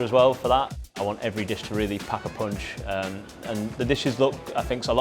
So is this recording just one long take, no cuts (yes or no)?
no